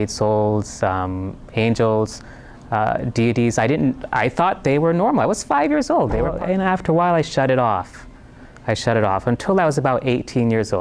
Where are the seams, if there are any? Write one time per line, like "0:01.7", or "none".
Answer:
0:06.3